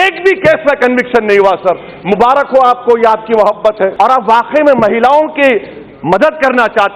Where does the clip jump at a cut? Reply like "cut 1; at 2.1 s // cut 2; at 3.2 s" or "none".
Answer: cut 1; at 3.9 s